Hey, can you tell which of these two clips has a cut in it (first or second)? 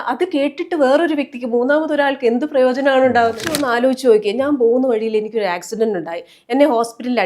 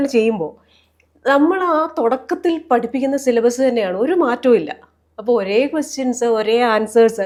first